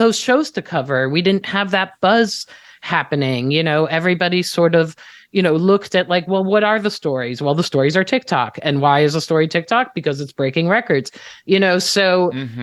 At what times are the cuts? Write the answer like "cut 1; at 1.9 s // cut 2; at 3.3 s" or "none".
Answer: none